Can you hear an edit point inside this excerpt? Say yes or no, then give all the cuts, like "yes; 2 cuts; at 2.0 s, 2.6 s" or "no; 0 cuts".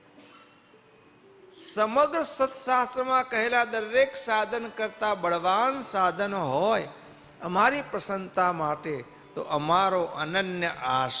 no; 0 cuts